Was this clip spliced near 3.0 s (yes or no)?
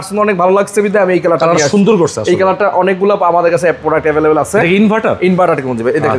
no